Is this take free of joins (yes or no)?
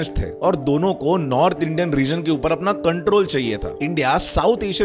no